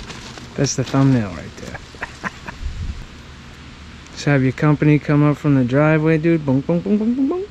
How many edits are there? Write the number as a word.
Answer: one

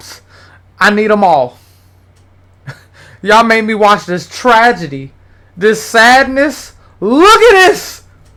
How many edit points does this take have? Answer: zero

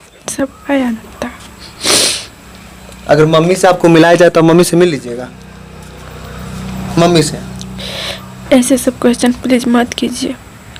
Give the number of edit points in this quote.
zero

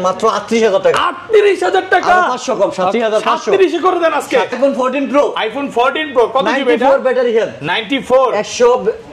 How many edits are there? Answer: one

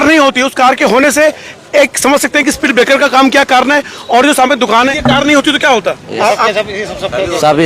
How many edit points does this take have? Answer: one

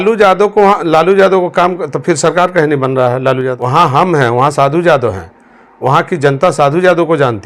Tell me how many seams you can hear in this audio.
one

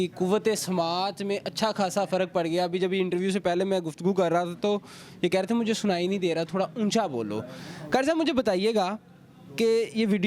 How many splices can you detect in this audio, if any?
zero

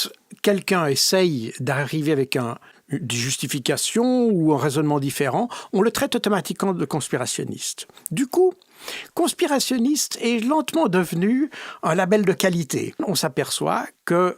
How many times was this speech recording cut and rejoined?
one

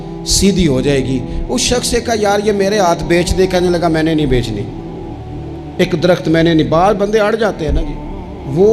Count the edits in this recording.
zero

